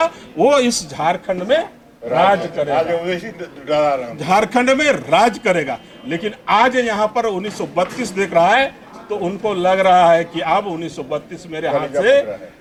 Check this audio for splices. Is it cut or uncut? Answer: uncut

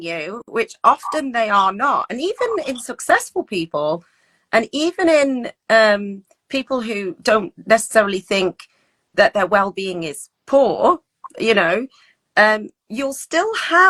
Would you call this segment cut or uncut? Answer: uncut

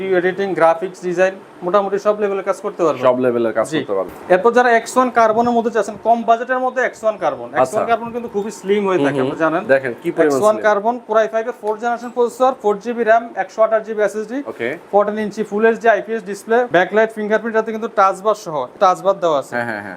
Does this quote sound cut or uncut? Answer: cut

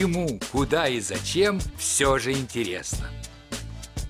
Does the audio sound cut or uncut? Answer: cut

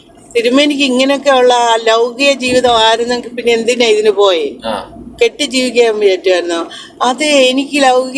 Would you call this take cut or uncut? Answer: uncut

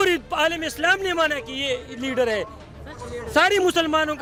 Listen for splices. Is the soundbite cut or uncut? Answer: uncut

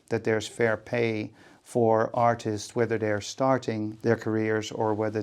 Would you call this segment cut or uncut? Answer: cut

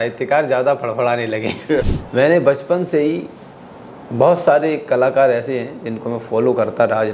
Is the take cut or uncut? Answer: cut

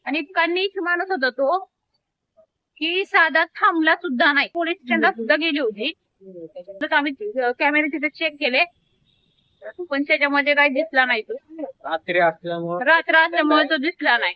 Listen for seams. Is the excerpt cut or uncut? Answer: cut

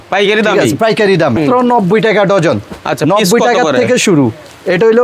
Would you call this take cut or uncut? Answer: cut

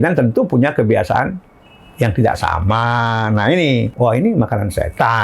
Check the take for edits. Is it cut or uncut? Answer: cut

